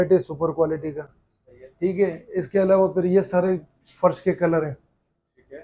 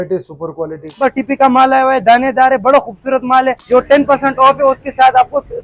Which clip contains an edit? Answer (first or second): second